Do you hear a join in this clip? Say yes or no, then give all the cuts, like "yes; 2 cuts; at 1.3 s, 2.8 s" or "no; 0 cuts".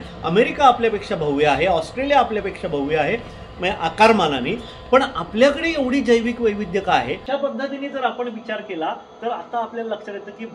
yes; 1 cut; at 7.2 s